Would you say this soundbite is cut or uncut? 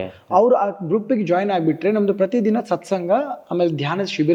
uncut